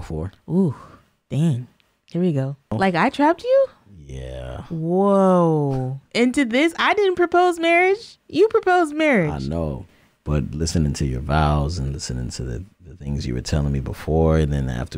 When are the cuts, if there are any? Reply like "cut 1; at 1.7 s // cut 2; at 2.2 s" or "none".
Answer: cut 1; at 2.7 s